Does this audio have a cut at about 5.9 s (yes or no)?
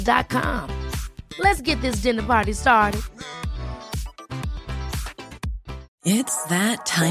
yes